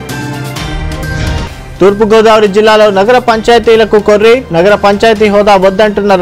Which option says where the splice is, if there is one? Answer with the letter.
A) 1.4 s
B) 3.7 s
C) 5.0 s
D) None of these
A